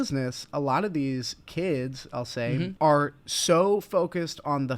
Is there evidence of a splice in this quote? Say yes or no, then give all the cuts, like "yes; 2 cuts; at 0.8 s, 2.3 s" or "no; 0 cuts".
yes; 1 cut; at 2.7 s